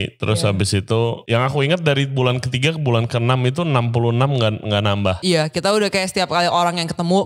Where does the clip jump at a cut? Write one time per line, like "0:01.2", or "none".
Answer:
0:01.2
0:05.2